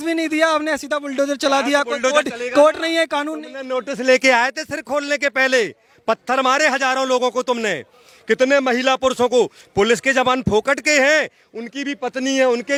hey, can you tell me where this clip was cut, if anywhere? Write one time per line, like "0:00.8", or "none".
none